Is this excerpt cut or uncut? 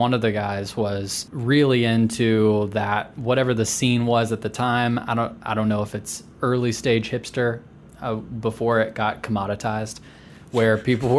cut